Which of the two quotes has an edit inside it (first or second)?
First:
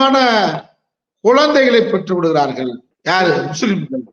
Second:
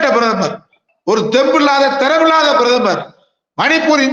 first